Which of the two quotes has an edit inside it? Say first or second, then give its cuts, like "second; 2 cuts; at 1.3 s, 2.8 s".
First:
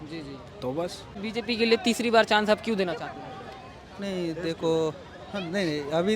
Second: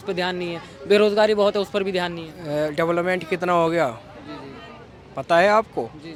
first; 1 cut; at 1.2 s